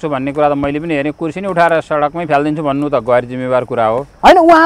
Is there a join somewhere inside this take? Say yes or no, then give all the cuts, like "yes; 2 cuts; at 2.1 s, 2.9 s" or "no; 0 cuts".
no; 0 cuts